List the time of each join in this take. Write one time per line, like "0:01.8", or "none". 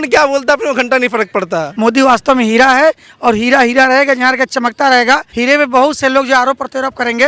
0:01.6
0:05.3

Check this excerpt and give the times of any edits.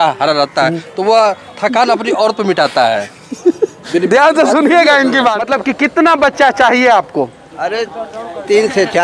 0:05.4

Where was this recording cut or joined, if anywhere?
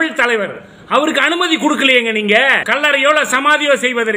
0:02.6

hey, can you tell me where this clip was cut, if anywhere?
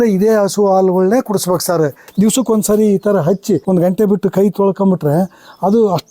0:02.0
0:03.6

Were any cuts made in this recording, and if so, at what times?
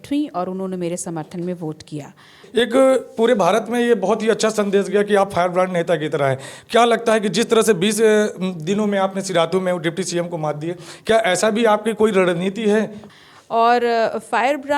0:02.4
0:13.0

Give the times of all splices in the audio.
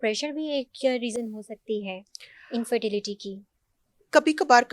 none

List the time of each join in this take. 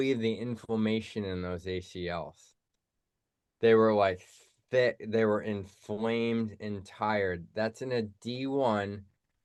none

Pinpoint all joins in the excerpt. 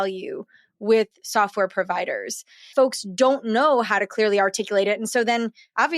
0:02.7

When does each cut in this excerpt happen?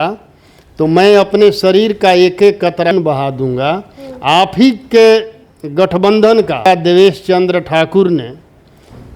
0:06.7

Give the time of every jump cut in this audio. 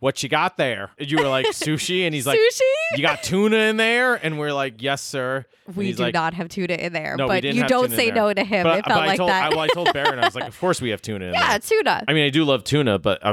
0:00.9

